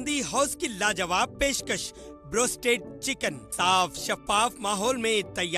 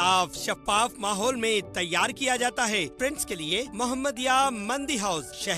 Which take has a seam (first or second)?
second